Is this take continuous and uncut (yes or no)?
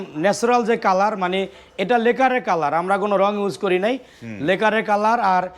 yes